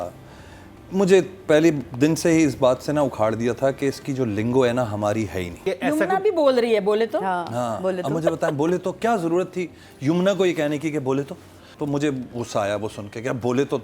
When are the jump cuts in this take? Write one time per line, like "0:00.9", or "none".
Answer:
0:05.6
0:11.7